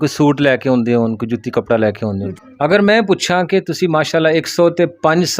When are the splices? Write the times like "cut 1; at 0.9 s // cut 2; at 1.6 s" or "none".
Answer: cut 1; at 2.3 s